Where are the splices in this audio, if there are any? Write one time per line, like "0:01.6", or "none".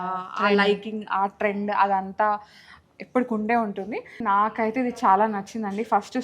0:04.2